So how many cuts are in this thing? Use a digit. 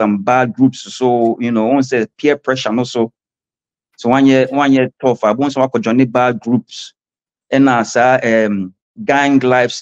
0